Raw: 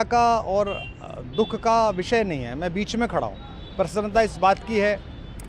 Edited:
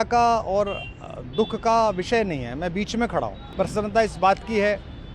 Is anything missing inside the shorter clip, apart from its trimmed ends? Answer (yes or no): yes